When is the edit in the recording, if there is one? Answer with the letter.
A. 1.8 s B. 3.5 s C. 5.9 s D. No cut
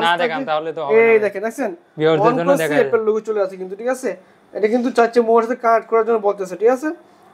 D